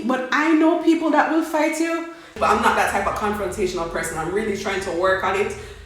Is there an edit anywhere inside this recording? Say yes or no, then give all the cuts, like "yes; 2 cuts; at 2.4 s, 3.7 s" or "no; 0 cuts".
yes; 1 cut; at 2.4 s